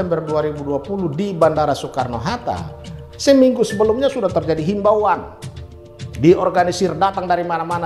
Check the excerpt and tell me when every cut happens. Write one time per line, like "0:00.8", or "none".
none